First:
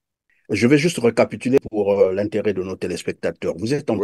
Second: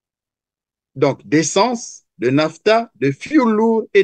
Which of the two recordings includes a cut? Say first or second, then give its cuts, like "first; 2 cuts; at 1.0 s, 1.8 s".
first; 1 cut; at 1.6 s